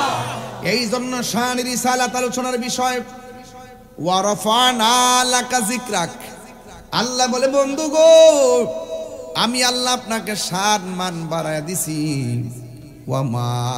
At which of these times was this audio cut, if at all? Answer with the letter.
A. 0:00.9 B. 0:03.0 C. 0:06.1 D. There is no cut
D